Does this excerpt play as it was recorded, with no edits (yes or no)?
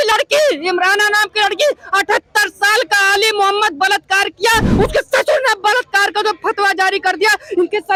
yes